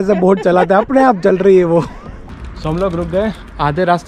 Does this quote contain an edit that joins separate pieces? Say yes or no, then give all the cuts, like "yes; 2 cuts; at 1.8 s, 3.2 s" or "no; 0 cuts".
yes; 1 cut; at 2.4 s